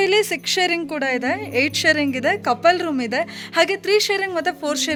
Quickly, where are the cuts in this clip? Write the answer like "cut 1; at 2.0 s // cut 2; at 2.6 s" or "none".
none